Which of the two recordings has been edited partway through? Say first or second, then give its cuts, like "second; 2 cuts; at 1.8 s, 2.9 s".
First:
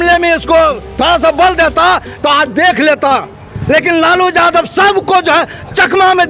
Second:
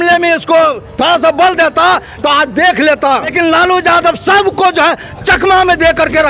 second; 1 cut; at 3.3 s